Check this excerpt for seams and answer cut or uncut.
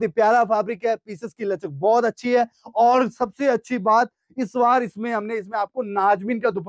uncut